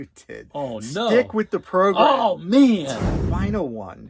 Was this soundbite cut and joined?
yes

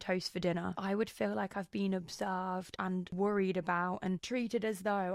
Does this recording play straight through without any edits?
no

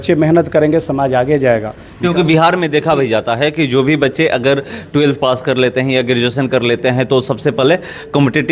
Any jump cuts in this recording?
no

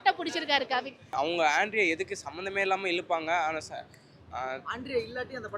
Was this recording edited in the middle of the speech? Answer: yes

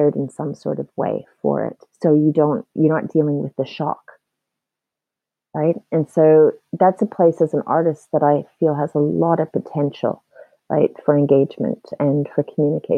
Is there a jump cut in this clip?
no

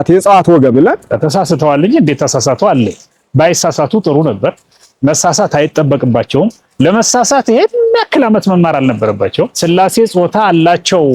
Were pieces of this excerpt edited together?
yes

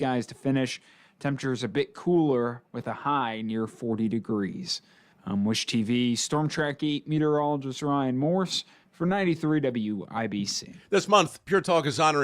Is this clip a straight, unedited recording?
no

